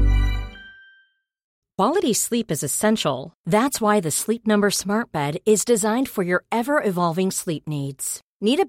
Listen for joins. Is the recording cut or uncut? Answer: cut